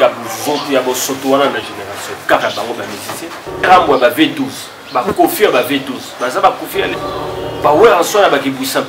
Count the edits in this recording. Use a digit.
2